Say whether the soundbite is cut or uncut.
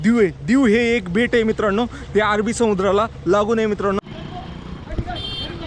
cut